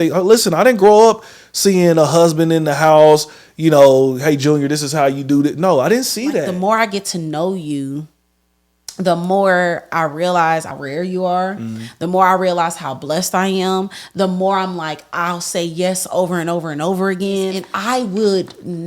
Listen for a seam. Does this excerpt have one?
yes; 3 cuts; at 6.5 s, 10.7 s, 17.7 s

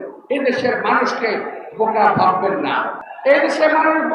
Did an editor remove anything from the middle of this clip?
yes; 1 cut; at 3.0 s

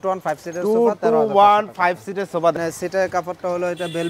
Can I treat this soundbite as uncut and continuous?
no; 1 cut; at 2.5 s

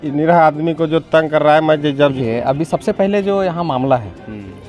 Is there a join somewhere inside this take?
yes; 1 cut; at 2.0 s

